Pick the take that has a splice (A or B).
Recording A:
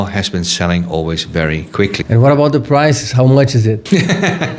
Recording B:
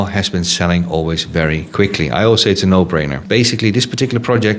A